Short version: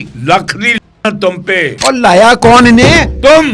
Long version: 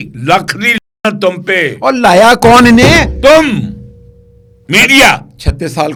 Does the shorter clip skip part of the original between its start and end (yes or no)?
no